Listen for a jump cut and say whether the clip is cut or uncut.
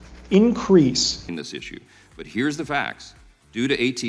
cut